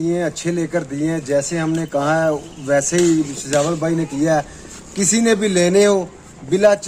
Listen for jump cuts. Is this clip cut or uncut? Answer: uncut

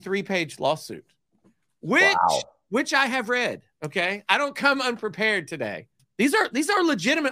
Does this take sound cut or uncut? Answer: cut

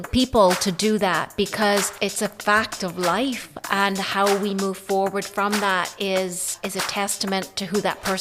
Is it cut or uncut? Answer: cut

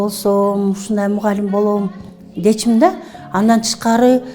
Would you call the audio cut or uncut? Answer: uncut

